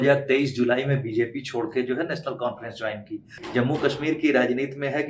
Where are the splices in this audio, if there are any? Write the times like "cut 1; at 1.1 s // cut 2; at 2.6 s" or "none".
cut 1; at 3.4 s

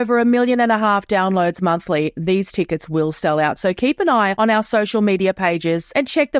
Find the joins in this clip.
none

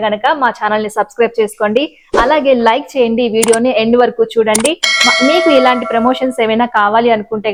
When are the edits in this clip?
none

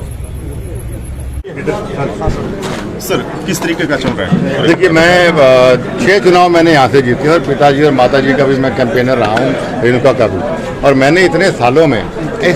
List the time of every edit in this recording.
cut 1; at 1.5 s

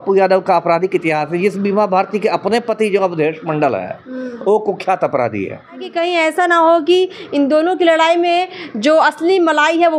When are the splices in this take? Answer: cut 1; at 5.9 s

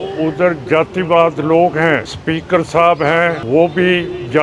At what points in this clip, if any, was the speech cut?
cut 1; at 2.1 s // cut 2; at 3.4 s

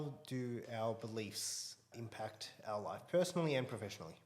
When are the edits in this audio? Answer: cut 1; at 1.9 s

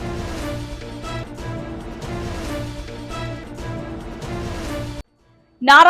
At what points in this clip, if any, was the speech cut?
cut 1; at 2.9 s // cut 2; at 5.0 s

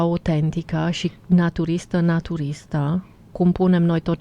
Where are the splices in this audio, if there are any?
none

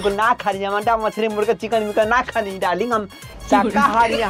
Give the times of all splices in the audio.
none

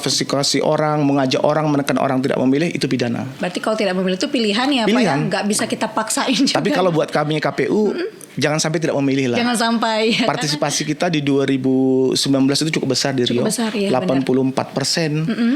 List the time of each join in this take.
cut 1; at 3.3 s

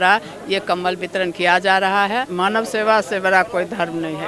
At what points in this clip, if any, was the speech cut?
cut 1; at 2.3 s

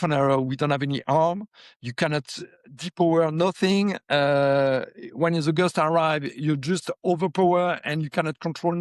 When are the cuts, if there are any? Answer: none

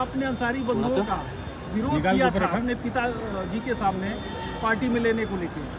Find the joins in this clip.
none

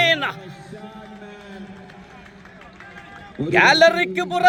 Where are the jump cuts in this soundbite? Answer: none

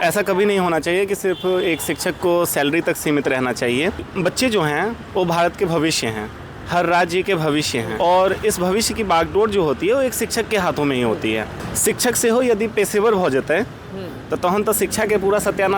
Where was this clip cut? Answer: cut 1; at 4.1 s // cut 2; at 7.9 s // cut 3; at 11.6 s

